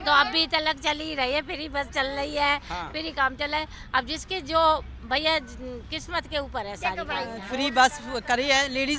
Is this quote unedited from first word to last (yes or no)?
no